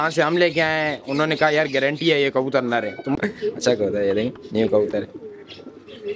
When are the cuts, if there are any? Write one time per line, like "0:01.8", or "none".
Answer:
0:03.1